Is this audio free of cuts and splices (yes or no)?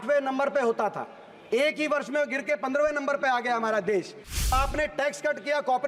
no